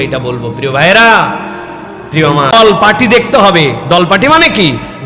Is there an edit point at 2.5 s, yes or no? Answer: yes